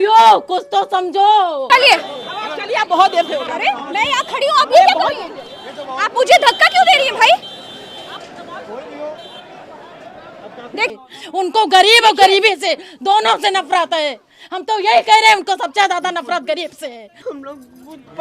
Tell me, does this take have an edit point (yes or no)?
yes